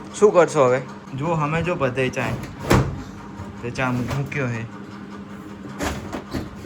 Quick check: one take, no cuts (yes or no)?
yes